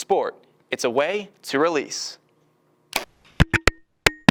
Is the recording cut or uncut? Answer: uncut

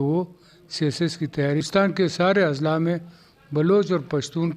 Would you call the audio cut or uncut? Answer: cut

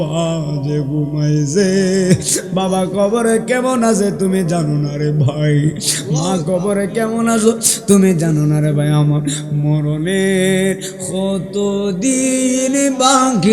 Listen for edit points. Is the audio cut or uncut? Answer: uncut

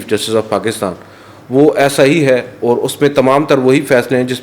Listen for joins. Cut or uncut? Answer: uncut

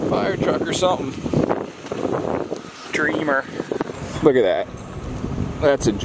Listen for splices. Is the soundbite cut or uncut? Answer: cut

